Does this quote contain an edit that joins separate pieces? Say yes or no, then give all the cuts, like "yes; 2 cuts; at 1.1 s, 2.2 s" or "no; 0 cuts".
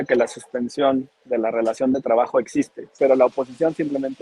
yes; 1 cut; at 2.9 s